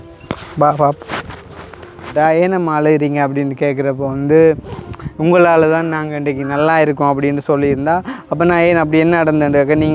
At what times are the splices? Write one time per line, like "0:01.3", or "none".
0:02.0